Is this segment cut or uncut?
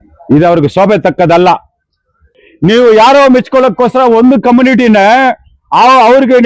cut